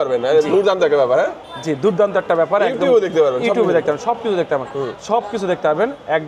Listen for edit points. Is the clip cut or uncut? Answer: uncut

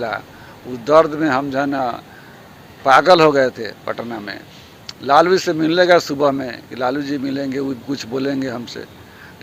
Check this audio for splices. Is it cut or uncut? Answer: uncut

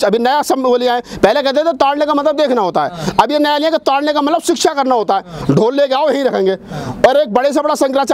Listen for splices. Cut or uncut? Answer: uncut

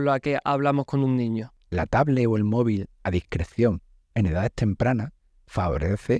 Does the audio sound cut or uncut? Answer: cut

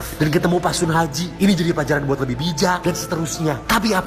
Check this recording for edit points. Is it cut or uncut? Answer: uncut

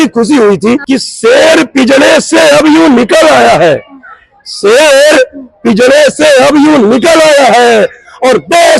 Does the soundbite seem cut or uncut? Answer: uncut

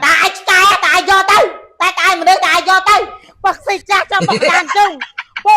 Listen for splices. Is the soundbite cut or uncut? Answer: cut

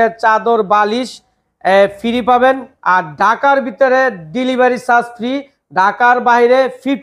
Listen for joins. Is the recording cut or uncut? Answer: uncut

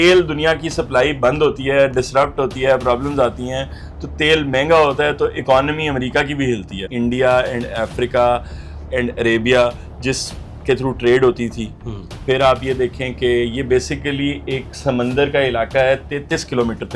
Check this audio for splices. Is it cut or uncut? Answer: cut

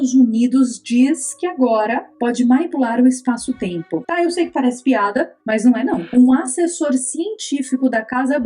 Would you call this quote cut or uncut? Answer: cut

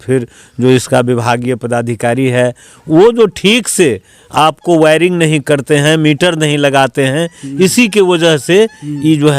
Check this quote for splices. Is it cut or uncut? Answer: cut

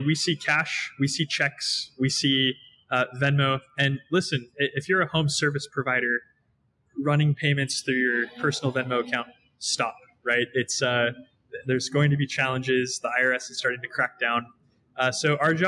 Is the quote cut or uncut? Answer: uncut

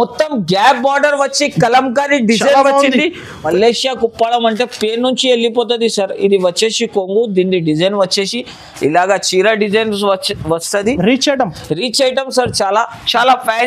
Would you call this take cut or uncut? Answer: cut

